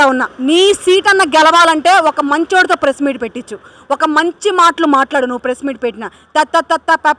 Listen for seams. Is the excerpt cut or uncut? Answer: uncut